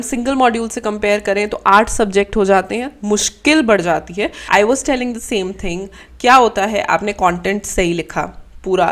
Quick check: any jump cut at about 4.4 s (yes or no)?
yes